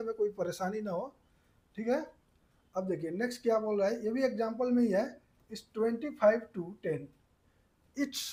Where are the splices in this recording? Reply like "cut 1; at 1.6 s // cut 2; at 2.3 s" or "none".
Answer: none